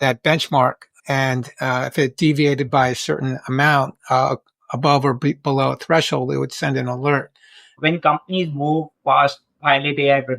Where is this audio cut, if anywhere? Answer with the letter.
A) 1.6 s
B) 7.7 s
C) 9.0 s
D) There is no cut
B